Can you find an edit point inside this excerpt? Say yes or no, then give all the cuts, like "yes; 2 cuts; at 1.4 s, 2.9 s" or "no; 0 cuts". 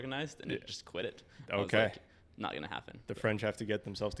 no; 0 cuts